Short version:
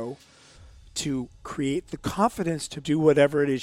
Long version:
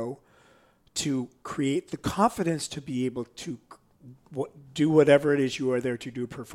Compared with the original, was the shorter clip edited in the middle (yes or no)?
yes